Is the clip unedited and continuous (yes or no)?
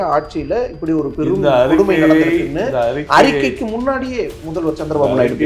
yes